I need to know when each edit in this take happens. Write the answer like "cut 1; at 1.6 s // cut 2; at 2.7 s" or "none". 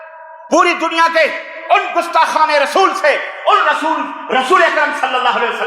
none